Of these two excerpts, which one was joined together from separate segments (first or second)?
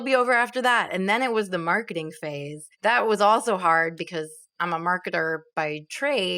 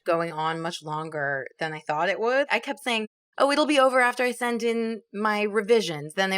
second